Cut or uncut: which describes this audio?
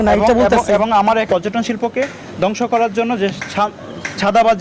cut